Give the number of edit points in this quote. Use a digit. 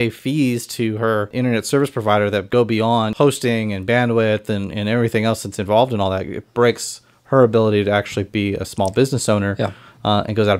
2